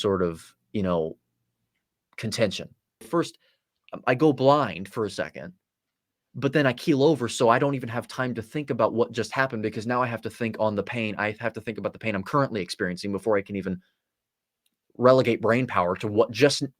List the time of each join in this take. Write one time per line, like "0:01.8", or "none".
0:03.1